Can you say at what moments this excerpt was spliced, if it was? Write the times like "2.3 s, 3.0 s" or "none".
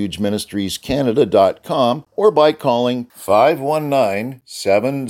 2.1 s